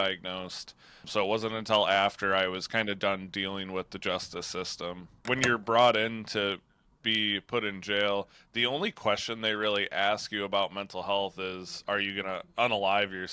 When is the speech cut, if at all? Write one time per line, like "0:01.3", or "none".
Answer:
0:05.1